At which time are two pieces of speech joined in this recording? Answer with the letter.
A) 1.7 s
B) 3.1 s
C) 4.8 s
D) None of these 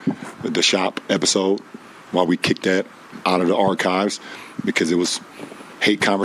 B